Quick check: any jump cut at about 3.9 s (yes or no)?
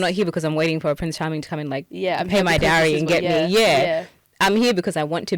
no